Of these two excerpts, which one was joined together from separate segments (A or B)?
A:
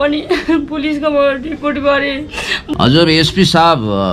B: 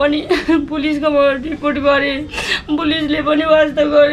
A